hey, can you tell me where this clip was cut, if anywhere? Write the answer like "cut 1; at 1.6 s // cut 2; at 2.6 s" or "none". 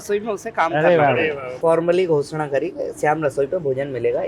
cut 1; at 1.5 s